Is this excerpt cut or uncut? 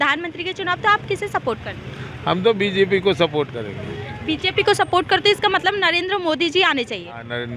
uncut